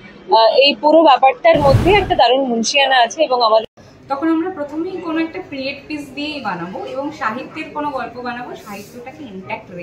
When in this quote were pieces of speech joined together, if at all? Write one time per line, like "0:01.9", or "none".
0:03.6